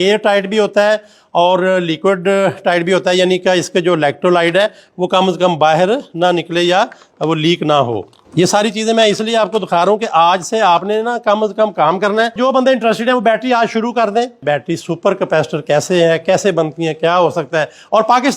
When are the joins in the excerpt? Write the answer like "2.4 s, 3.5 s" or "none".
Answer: 8.2 s, 12.4 s, 14.4 s